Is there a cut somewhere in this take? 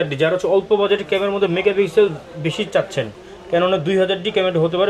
no; 0 cuts

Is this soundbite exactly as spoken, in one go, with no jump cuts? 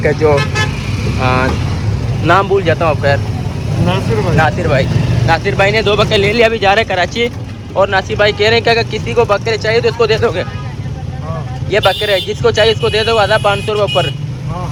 yes; 0 cuts

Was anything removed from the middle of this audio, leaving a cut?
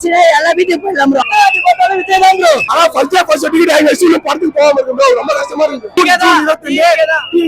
yes; 3 cuts; at 1.2 s, 2.7 s, 5.9 s

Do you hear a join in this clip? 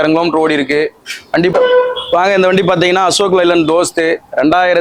yes; 1 cut; at 1.5 s

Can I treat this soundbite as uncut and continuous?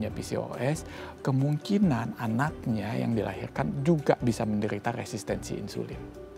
yes; 0 cuts

